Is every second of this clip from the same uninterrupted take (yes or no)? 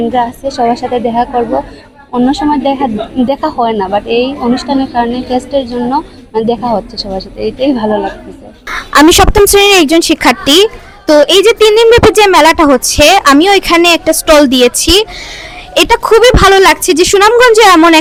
yes